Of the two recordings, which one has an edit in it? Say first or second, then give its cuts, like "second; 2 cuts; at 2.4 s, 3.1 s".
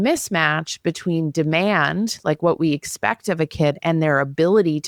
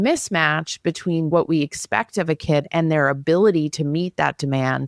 second; 1 cut; at 1.3 s